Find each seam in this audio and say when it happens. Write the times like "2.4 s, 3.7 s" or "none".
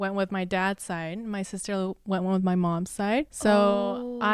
3.3 s